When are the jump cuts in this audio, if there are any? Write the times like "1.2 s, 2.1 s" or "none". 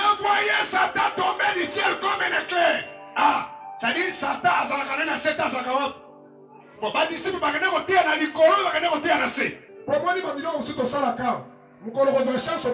9.8 s